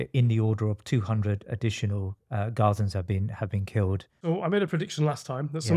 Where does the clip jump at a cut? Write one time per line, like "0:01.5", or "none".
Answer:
0:04.2